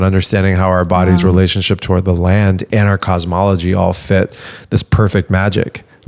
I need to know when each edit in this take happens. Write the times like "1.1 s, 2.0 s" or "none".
none

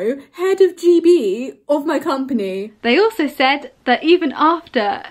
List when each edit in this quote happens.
2.7 s

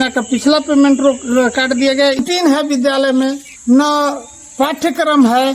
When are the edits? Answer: 2.2 s

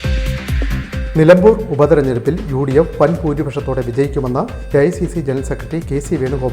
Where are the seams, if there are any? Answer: none

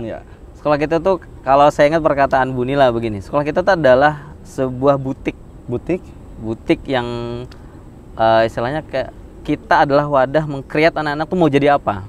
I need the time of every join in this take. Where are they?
none

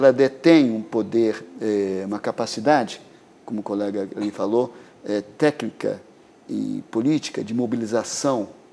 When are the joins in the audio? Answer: none

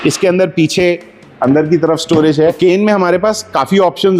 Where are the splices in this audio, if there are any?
2.6 s

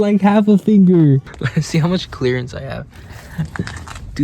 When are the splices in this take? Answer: 1.4 s

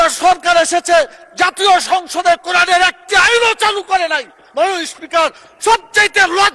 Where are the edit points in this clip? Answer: none

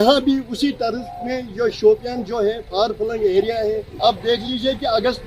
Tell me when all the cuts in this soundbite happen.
3.9 s

